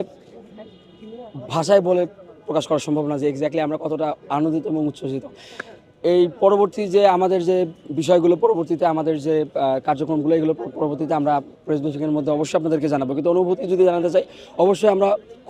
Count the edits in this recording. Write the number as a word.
zero